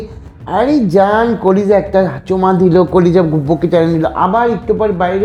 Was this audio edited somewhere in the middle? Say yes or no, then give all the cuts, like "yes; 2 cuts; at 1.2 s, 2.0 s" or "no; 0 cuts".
no; 0 cuts